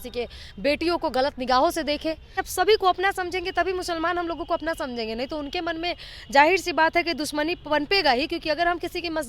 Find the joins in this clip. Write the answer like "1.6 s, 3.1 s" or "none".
2.4 s